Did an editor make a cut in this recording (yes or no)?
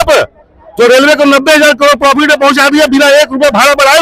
no